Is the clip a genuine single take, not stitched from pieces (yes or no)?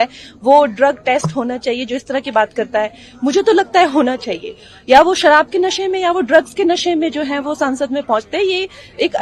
yes